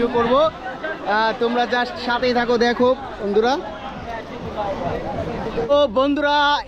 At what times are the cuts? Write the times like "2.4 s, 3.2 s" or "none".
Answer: 5.7 s